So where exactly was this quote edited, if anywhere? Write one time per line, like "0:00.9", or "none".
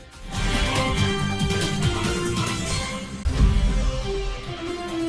0:03.3